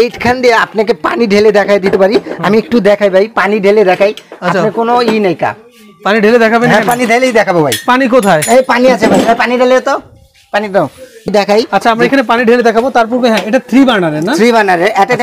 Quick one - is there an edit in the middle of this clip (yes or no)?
no